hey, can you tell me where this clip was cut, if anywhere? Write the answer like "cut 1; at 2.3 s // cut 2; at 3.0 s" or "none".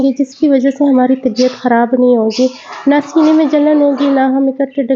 none